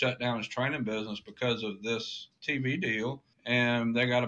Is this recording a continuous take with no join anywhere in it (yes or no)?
no